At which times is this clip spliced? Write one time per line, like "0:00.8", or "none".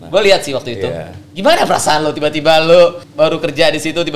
0:03.0